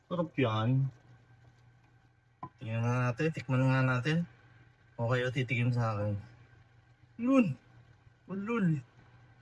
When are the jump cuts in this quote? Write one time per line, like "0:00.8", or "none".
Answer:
0:02.1